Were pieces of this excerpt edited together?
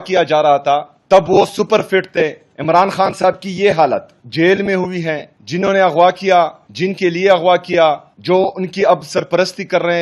yes; 6 cuts; at 0.9 s, 2.5 s, 4.2 s, 5.3 s, 6.6 s, 8.1 s

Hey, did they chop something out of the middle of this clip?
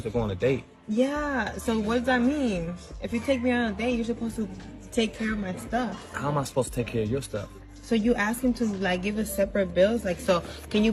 yes; 2 cuts; at 1.0 s, 8.0 s

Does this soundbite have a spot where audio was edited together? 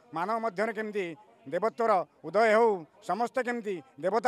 no; 0 cuts

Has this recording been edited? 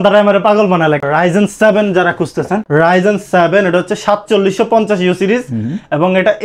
yes; 2 cuts; at 1.0 s, 2.6 s

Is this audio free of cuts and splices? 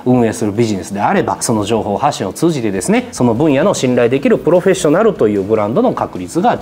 yes; 0 cuts

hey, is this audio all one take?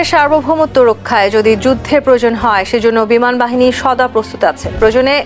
yes; 0 cuts

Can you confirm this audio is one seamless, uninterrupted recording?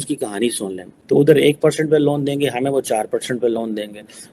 no; 1 cut; at 1.0 s

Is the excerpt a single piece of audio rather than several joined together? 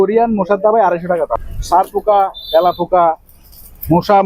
no; 1 cut; at 1.4 s

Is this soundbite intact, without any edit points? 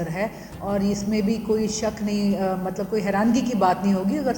yes; 0 cuts

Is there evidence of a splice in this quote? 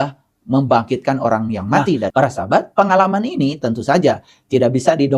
yes; 1 cut; at 2.1 s

